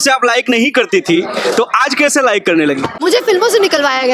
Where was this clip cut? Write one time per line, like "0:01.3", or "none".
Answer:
0:03.0